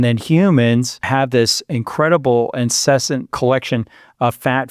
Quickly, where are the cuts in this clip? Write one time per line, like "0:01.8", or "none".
0:01.0
0:03.3